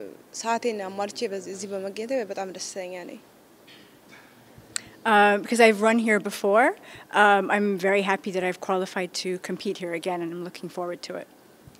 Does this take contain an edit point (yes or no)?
yes